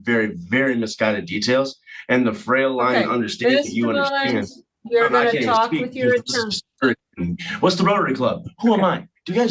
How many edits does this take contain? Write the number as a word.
zero